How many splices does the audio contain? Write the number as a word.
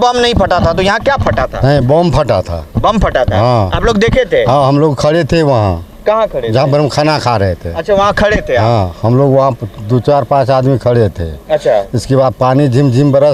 zero